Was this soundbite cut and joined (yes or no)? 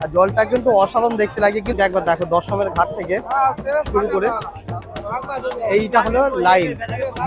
yes